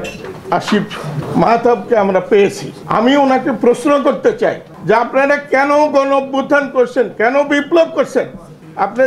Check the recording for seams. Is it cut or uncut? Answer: cut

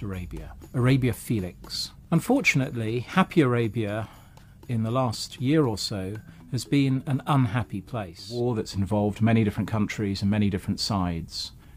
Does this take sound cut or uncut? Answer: cut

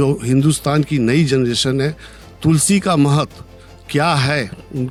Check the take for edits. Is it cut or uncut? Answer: uncut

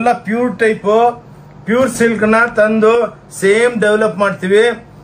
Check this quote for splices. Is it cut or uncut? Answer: uncut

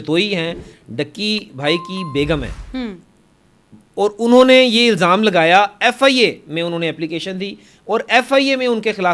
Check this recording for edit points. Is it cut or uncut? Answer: uncut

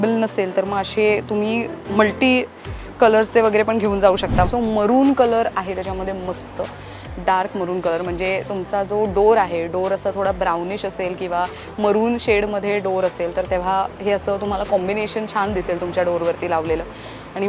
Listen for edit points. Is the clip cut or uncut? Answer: cut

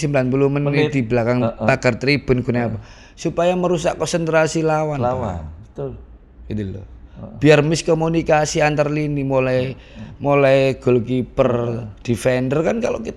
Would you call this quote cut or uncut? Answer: uncut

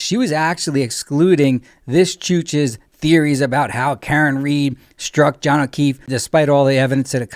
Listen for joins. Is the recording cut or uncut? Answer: cut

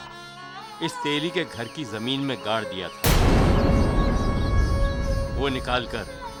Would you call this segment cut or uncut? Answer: uncut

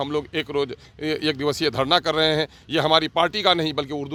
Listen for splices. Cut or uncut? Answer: uncut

